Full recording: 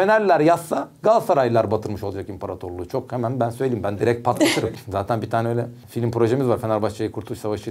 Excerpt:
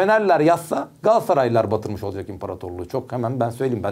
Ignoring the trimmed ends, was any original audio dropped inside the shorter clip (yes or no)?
no